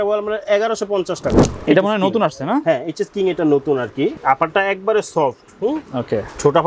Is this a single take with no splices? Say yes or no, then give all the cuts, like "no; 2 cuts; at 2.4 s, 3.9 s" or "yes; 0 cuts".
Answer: no; 2 cuts; at 1.4 s, 4.2 s